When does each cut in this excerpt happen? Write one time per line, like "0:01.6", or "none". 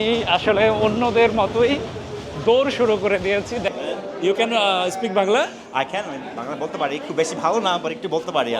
0:03.7